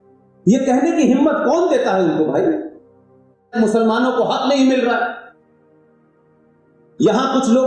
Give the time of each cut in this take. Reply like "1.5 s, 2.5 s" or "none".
3.5 s